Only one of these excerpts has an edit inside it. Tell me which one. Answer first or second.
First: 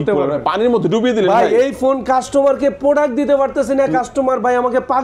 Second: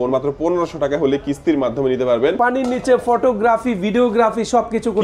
second